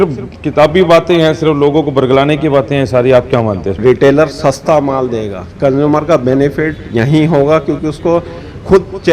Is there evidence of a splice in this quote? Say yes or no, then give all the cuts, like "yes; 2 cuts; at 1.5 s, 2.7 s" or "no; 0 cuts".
yes; 1 cut; at 3.8 s